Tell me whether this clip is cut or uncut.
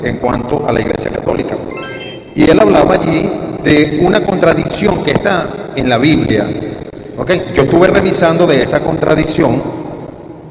uncut